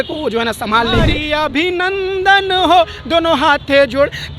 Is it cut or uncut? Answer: cut